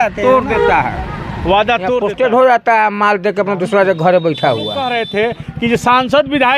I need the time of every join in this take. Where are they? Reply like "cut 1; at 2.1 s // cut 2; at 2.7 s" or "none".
cut 1; at 2.0 s // cut 2; at 4.9 s